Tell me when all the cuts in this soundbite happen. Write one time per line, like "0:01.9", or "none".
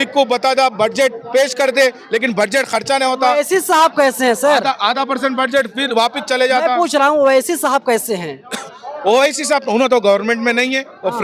none